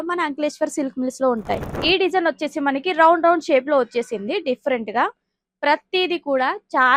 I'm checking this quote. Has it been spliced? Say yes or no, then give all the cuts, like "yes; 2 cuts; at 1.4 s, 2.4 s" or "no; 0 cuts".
yes; 1 cut; at 1.7 s